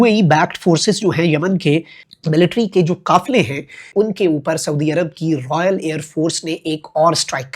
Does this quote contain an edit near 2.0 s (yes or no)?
yes